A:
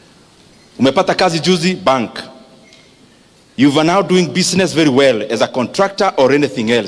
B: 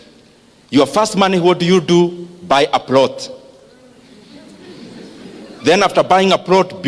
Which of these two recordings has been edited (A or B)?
A